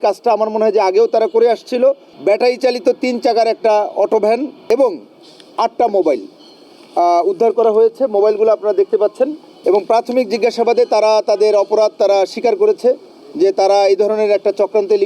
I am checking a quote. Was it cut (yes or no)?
yes